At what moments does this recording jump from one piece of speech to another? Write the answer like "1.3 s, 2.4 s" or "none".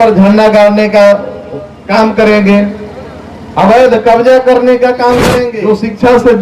5.4 s